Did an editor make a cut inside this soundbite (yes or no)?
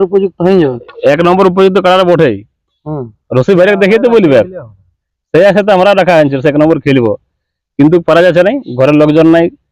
no